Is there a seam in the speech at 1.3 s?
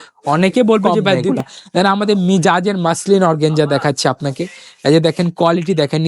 yes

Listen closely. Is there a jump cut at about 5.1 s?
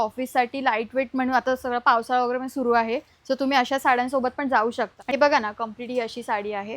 yes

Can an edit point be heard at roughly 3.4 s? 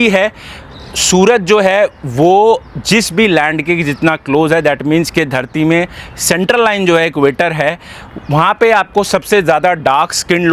no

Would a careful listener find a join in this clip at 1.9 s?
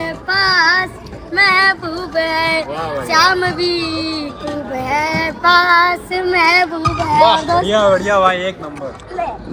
no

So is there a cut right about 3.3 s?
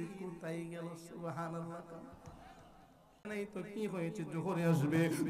yes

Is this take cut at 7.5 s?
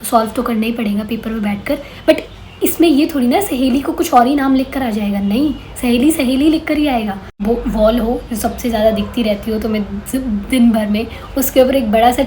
yes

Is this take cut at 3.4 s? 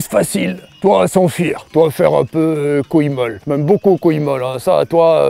yes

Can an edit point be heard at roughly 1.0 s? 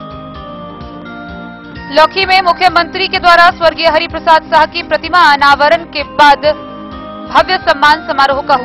yes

